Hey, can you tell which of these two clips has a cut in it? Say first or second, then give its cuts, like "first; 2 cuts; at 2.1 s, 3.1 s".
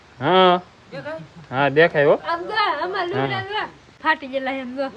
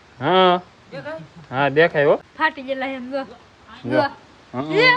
second; 1 cut; at 2.2 s